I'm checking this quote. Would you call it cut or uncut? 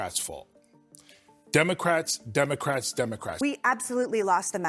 cut